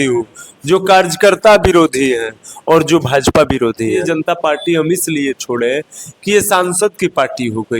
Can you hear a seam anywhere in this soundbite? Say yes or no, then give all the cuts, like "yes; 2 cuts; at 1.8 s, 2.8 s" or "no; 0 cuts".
yes; 1 cut; at 4.0 s